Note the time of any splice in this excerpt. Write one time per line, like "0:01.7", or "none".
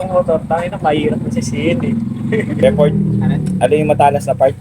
0:02.4